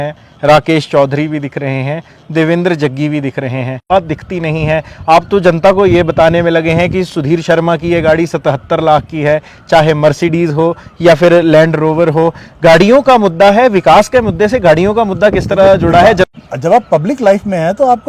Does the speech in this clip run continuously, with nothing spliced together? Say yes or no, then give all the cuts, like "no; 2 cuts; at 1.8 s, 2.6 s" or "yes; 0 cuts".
no; 2 cuts; at 3.8 s, 16.3 s